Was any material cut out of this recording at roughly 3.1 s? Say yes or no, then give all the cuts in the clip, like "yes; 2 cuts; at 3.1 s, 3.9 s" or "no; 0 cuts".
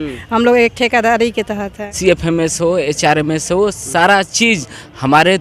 no; 1 cut; at 1.9 s